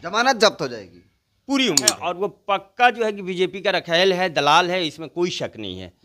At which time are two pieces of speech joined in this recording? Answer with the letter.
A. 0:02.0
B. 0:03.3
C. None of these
A